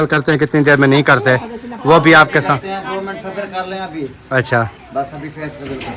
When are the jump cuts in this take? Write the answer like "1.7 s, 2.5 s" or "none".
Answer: none